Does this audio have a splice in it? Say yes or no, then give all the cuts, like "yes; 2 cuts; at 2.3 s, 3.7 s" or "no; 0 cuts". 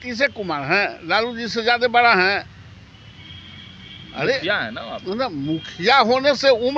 no; 0 cuts